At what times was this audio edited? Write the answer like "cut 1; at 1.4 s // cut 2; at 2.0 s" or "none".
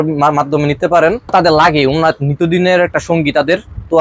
cut 1; at 1.3 s